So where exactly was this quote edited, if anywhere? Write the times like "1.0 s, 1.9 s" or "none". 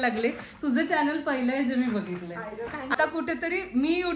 2.9 s